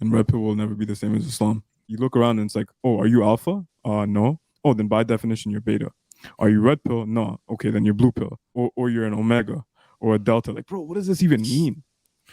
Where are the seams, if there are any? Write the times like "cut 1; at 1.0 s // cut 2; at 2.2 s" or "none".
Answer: cut 1; at 1.8 s // cut 2; at 8.5 s